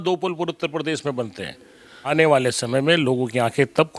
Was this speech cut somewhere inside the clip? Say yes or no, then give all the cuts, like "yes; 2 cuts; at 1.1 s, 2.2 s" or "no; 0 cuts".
yes; 1 cut; at 2.1 s